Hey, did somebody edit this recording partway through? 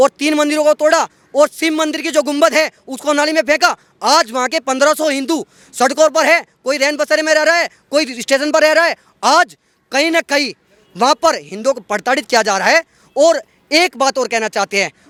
no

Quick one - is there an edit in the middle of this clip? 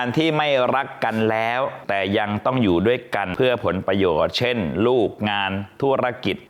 no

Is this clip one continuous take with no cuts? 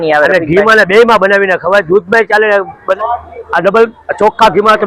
no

